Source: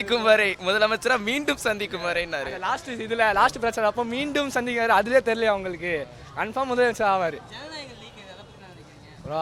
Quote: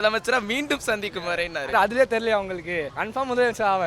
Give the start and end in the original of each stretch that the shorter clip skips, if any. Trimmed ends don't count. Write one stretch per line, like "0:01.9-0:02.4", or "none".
0:02.5-0:04.9
0:06.1-0:06.4